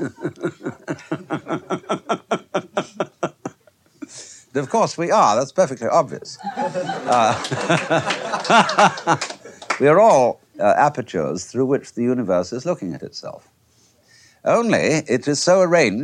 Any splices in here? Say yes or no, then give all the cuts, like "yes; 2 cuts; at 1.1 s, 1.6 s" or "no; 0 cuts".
no; 0 cuts